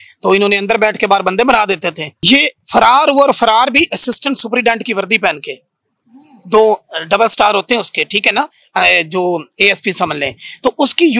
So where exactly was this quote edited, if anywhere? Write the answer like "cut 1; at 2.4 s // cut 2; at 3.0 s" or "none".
cut 1; at 2.2 s